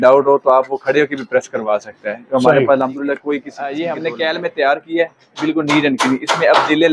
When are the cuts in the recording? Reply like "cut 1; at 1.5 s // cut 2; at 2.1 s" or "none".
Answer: cut 1; at 3.6 s